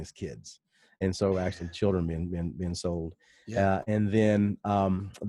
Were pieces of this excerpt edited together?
no; 0 cuts

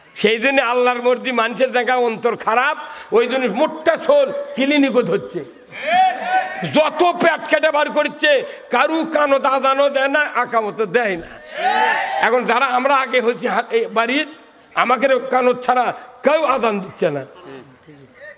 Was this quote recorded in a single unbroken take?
yes; 0 cuts

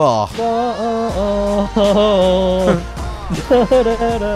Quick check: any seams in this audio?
no; 0 cuts

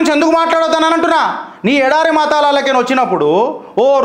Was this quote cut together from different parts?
no; 0 cuts

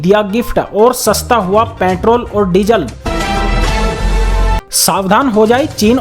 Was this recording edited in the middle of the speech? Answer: yes; 2 cuts; at 3.0 s, 4.6 s

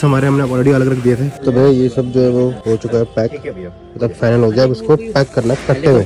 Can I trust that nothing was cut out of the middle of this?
no; 2 cuts; at 1.4 s, 2.6 s

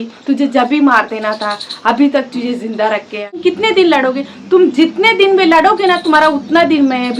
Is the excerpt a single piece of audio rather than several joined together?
no; 1 cut; at 3.3 s

